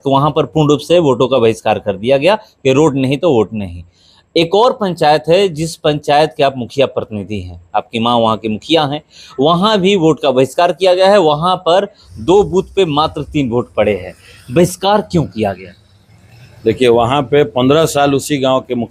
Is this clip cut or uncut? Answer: uncut